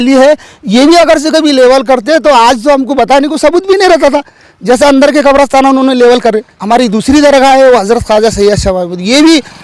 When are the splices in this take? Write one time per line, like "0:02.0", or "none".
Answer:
0:06.5

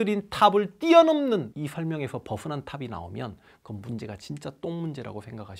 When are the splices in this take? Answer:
none

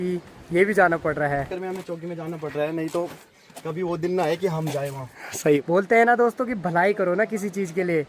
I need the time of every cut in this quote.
0:01.5
0:05.6

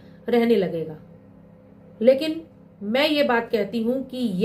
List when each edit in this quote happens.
none

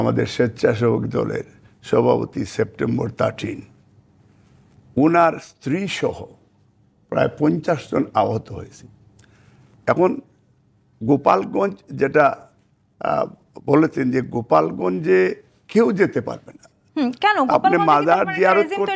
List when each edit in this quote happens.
none

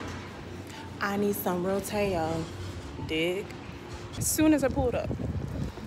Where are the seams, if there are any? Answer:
0:04.2

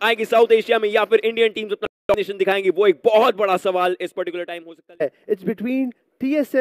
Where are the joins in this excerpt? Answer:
0:05.0

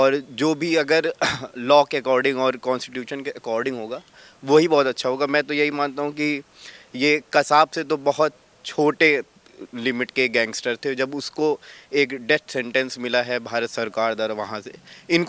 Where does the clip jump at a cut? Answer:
none

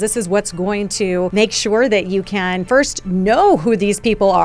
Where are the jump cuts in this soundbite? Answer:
0:01.3
0:02.6

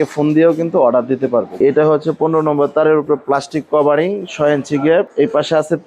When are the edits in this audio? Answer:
0:01.6
0:05.1

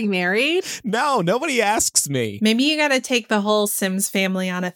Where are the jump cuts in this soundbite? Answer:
0:02.3

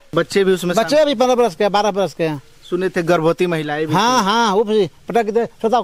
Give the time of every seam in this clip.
none

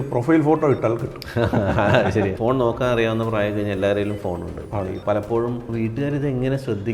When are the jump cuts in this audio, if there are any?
0:02.4
0:05.6

